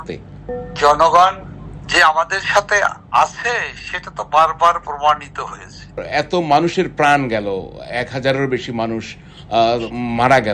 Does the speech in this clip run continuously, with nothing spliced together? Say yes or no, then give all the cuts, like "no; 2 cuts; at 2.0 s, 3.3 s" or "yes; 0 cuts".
no; 1 cut; at 6.0 s